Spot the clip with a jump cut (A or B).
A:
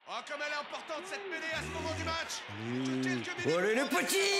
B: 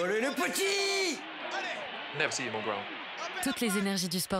B